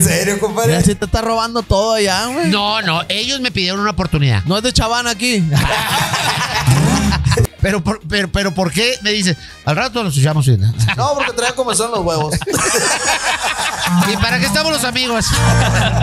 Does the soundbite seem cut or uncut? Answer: cut